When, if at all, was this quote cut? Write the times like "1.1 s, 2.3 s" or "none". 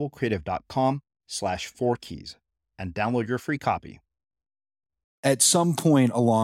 5.1 s